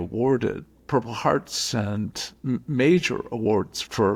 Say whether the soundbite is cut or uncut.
uncut